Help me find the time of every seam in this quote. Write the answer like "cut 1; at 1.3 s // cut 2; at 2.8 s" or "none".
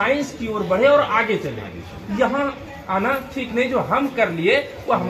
none